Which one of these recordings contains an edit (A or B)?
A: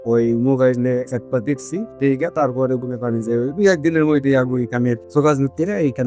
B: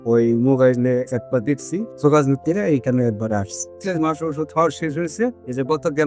B